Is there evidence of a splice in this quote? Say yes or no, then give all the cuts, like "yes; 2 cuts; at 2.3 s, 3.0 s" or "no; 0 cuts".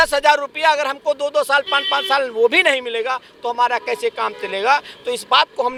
no; 0 cuts